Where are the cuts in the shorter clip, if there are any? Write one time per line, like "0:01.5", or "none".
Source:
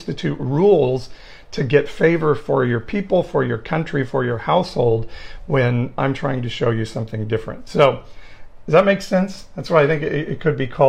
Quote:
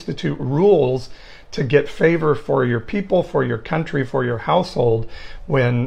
none